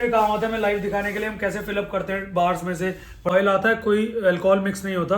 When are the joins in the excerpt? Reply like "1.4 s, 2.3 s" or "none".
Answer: 3.3 s